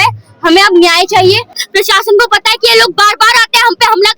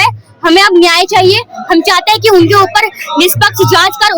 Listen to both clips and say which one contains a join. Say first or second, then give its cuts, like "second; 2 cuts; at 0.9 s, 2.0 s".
first; 1 cut; at 1.5 s